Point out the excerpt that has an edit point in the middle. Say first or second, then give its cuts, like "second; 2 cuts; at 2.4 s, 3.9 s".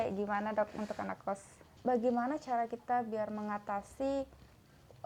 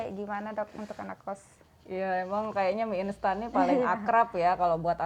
first; 1 cut; at 1.6 s